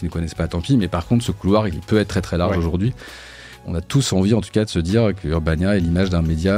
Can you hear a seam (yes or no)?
yes